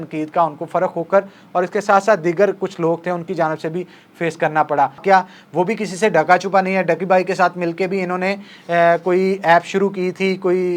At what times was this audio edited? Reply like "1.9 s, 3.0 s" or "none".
5.0 s

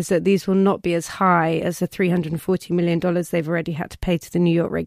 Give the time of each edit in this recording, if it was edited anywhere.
none

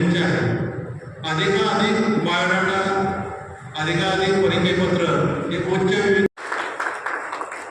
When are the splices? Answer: 6.3 s

